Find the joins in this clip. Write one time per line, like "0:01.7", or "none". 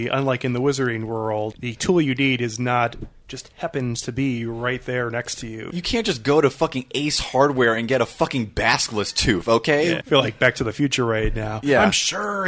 0:01.5
0:05.7
0:10.0